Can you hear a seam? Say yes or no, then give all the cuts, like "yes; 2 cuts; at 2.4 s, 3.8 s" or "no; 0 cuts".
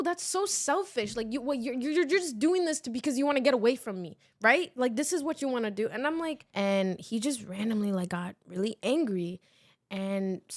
yes; 1 cut; at 6.4 s